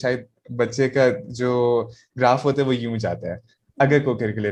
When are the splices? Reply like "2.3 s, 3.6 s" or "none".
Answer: none